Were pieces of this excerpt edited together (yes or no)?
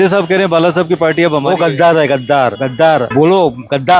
yes